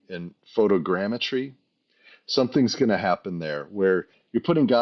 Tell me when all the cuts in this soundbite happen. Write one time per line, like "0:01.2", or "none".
none